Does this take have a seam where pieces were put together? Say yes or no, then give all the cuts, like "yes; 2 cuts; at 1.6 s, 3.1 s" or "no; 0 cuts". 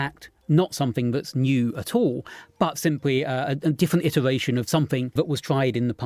yes; 1 cut; at 5.1 s